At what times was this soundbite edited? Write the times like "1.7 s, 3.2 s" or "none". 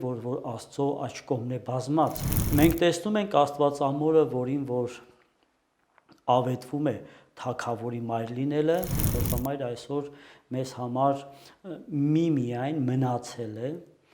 2.3 s, 9.2 s

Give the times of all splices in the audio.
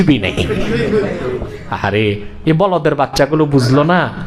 1.6 s

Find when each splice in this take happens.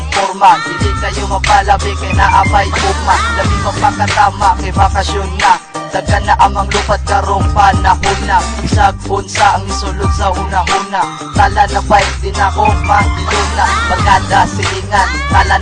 12.4 s

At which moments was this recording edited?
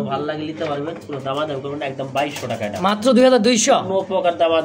none

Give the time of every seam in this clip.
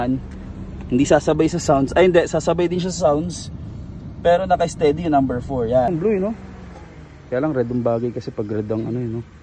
5.9 s

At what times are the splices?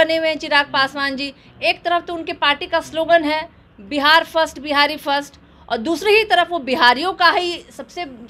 none

